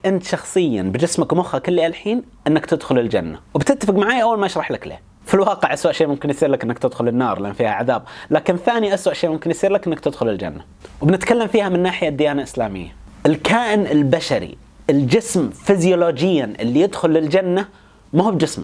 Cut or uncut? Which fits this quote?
uncut